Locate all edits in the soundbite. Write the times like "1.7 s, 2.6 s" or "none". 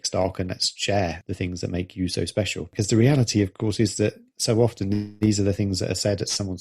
1.2 s, 2.7 s